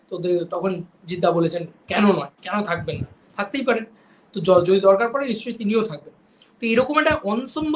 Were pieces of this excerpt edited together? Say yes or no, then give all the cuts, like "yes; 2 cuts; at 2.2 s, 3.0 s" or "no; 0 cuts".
no; 0 cuts